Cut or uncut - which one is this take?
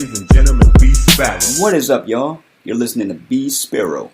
cut